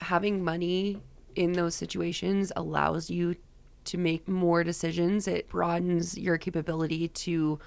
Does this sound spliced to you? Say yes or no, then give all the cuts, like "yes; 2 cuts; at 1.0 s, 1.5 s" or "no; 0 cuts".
yes; 2 cuts; at 4.2 s, 5.5 s